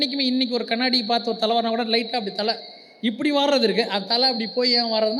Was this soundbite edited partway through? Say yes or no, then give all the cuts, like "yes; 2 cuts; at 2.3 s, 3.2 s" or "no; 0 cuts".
no; 0 cuts